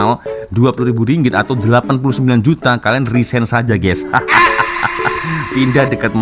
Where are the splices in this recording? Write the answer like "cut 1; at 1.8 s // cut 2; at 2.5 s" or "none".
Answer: none